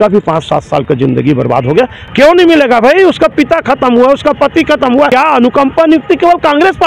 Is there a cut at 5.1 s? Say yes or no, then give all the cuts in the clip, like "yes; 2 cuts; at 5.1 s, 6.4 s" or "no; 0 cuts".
yes; 2 cuts; at 2.0 s, 5.1 s